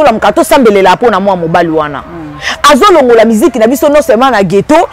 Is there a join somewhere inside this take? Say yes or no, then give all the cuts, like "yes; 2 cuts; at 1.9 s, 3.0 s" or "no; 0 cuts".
no; 0 cuts